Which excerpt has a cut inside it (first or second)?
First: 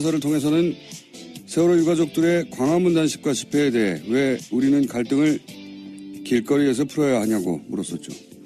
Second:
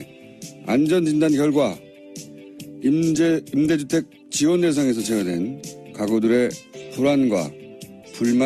first